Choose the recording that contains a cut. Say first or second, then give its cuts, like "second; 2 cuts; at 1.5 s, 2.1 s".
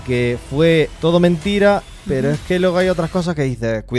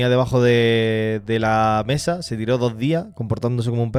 first; 1 cut; at 0.9 s